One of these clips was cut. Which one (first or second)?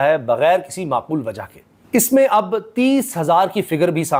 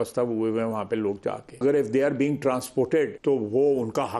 second